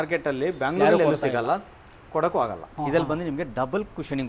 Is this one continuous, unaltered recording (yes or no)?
no